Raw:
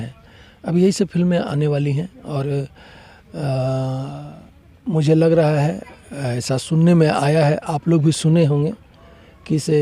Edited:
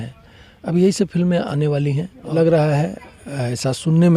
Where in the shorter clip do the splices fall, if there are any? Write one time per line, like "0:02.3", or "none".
0:02.3

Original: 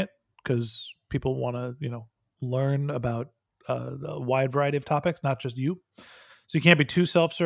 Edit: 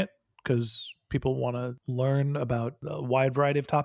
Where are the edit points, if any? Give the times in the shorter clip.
0:01.8
0:02.8

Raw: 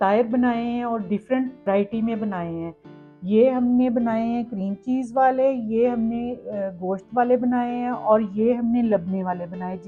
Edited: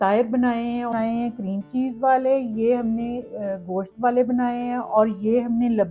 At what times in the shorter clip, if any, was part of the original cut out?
0:00.9

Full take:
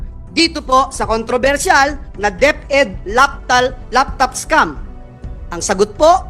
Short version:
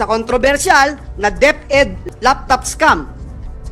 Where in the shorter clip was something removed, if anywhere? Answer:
0:02.1

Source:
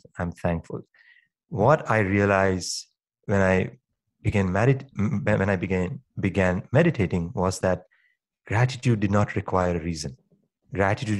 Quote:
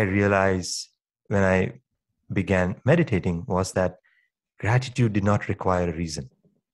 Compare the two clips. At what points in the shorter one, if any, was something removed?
0:02.1

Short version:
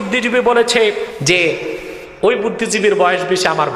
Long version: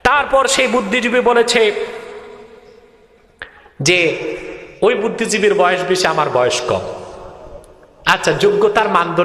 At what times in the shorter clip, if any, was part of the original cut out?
0:01.1

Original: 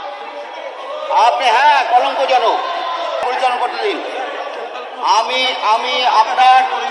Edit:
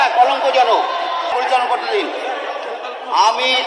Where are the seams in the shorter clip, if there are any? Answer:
0:01.3

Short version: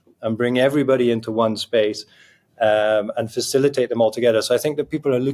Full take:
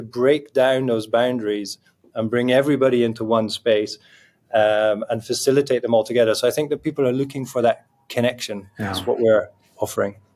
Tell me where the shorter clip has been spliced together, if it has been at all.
none

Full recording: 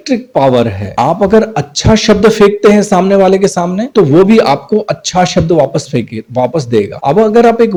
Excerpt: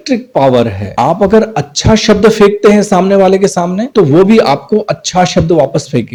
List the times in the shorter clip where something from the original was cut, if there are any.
none

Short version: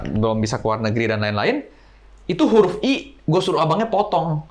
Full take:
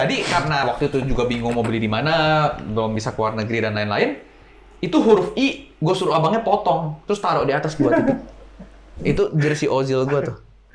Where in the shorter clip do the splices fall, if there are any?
none

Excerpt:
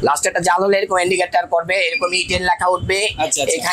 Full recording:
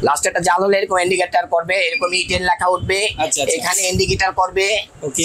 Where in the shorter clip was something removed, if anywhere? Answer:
none

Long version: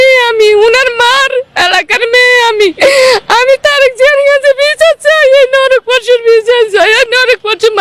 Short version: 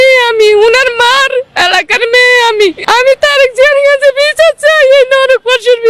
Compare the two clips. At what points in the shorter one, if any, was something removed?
0:02.8

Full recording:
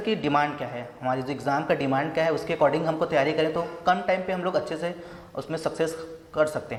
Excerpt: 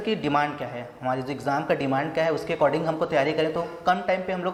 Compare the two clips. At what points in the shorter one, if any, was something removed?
none

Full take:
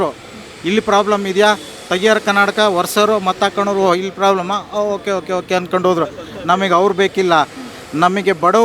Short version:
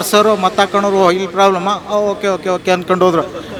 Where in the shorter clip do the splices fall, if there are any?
none

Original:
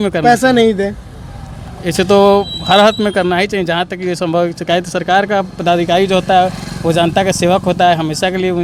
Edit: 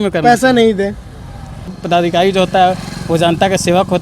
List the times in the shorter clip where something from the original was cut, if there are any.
0:01.8

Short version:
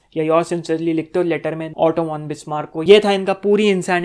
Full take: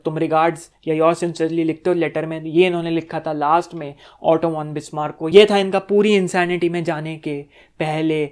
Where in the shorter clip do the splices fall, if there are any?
0:01.6

